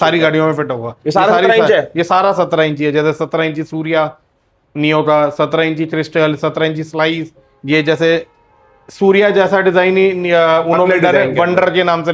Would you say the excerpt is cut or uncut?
uncut